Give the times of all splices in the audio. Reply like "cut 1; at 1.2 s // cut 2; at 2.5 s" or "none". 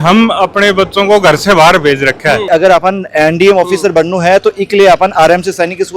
cut 1; at 2.4 s